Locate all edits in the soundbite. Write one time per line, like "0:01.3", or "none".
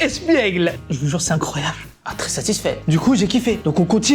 0:01.7

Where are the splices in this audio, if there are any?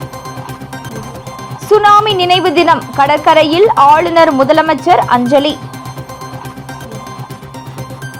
0:01.0

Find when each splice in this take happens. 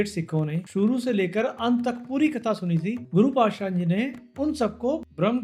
none

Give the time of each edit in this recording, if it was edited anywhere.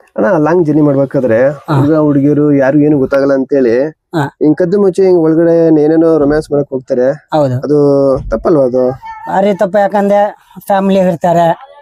none

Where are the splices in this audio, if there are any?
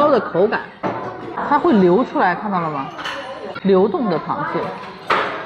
0:01.4
0:03.5

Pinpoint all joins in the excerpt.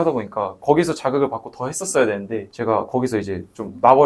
none

